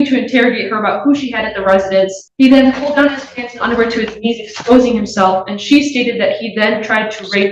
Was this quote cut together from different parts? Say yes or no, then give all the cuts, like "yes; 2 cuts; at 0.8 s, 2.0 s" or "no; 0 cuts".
yes; 1 cut; at 2.2 s